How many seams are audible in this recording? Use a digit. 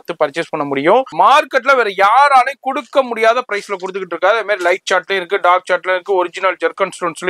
1